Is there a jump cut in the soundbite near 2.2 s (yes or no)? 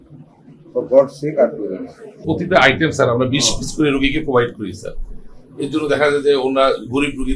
yes